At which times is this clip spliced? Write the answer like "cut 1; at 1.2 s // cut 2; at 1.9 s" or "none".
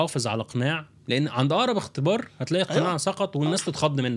none